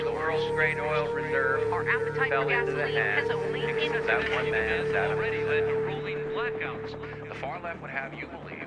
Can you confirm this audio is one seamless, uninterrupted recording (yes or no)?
no